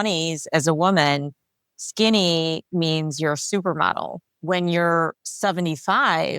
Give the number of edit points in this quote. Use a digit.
2